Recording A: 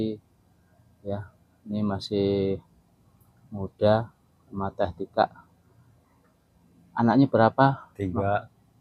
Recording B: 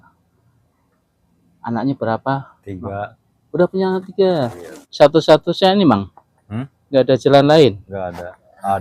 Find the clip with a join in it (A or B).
B